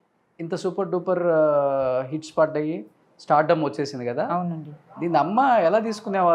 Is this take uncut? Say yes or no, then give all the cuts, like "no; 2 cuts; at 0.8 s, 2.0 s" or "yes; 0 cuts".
yes; 0 cuts